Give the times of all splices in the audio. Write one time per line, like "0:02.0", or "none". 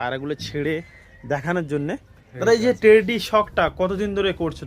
0:02.3